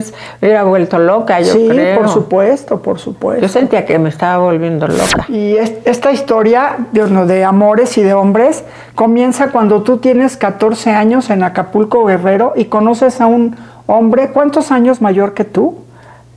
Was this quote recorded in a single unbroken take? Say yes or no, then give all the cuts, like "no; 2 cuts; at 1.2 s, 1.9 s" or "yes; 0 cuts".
no; 1 cut; at 5.2 s